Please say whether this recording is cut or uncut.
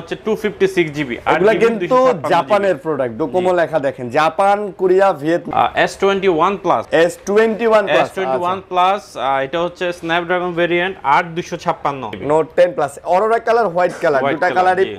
cut